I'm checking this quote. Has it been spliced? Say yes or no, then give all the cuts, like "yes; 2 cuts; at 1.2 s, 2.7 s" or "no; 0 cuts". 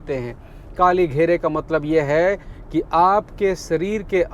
no; 0 cuts